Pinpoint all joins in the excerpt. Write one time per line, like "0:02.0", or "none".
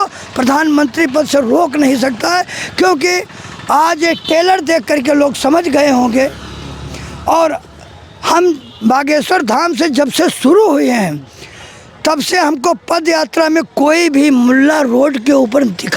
none